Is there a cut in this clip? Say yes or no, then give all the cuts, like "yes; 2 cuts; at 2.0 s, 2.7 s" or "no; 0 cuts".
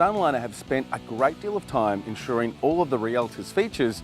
no; 0 cuts